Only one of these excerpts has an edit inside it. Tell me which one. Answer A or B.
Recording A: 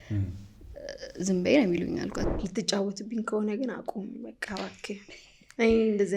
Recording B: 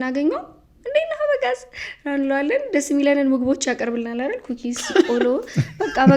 A